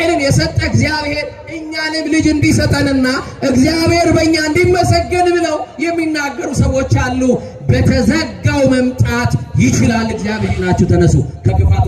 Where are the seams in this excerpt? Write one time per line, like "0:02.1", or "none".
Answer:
0:10.5